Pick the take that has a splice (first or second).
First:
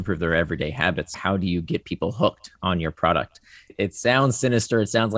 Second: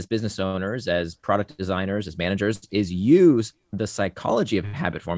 first